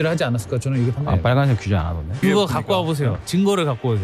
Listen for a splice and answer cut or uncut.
cut